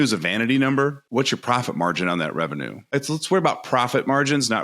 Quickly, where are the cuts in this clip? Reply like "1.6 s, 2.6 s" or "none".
1.0 s, 2.8 s